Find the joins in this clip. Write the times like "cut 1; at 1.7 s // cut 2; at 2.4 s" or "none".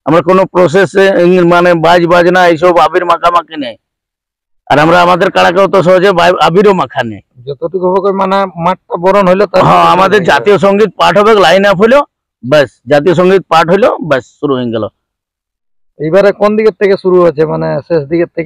none